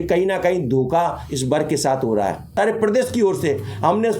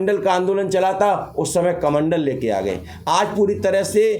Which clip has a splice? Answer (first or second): first